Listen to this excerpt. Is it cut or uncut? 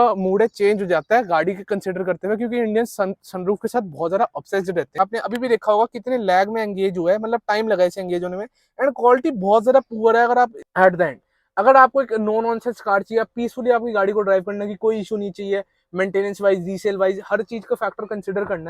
cut